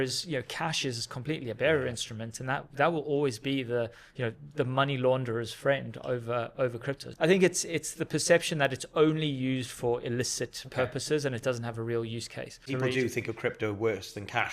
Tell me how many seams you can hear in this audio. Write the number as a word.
two